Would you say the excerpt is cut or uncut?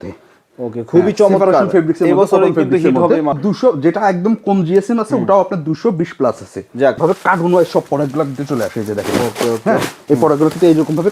cut